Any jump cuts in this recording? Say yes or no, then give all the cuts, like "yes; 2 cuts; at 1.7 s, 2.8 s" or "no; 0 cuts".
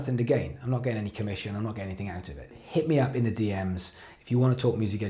yes; 1 cut; at 2.6 s